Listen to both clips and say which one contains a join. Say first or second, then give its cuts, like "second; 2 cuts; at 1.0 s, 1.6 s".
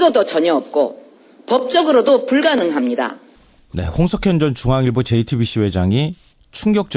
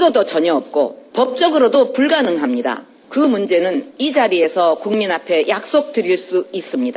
second; 2 cuts; at 1.0 s, 2.9 s